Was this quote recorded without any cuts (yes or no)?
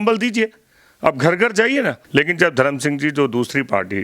no